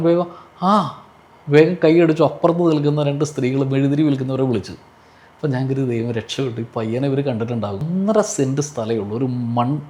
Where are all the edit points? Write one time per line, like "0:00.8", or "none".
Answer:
0:07.8